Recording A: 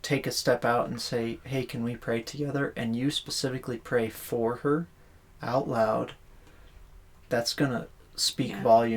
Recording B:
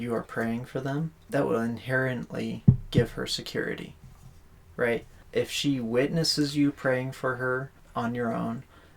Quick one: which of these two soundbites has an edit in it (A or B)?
B